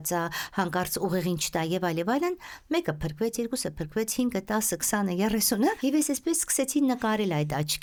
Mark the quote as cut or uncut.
uncut